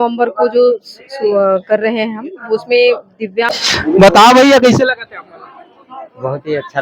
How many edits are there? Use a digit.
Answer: 1